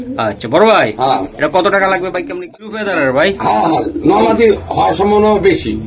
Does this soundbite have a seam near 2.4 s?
yes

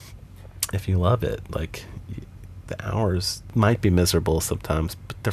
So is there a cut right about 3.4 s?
yes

